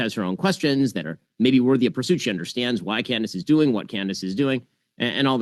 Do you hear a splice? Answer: no; 0 cuts

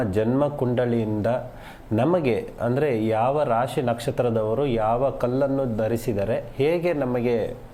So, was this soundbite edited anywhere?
no; 0 cuts

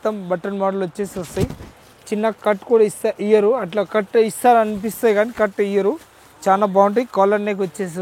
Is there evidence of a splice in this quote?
no; 0 cuts

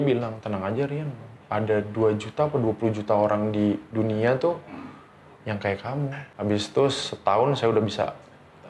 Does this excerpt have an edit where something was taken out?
yes; 1 cut; at 6.2 s

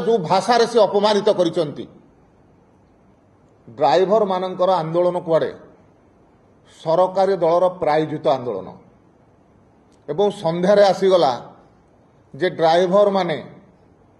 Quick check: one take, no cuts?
no; 1 cut; at 3.2 s

